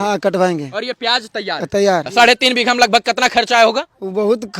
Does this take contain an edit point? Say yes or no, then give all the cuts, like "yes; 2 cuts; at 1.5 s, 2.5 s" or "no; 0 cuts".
yes; 1 cut; at 2.1 s